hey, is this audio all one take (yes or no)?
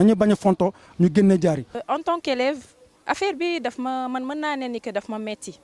no